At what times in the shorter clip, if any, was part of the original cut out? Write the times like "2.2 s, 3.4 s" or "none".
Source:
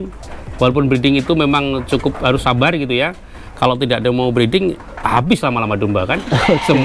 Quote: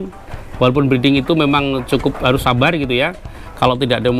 none